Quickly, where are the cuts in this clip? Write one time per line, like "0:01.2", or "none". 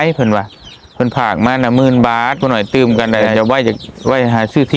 0:02.4